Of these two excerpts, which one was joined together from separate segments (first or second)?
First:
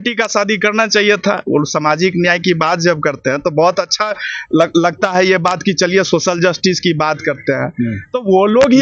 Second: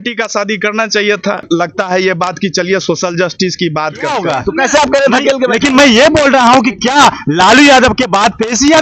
second